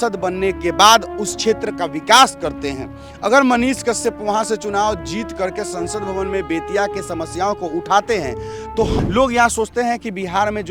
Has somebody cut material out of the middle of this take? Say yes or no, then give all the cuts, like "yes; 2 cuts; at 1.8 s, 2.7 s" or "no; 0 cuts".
yes; 1 cut; at 8.9 s